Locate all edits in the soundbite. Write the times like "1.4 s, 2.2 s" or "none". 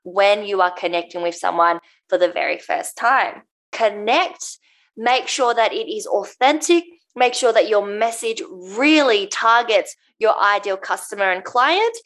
3.7 s